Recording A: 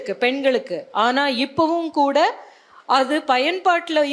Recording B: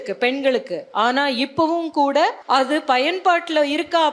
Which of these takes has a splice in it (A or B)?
B